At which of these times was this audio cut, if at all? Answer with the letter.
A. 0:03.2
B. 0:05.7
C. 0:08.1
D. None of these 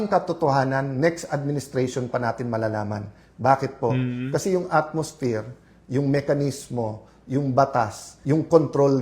C